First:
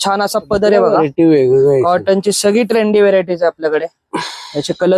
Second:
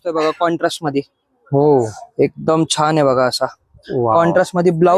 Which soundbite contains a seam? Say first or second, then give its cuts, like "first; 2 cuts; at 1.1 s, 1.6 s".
first; 1 cut; at 0.9 s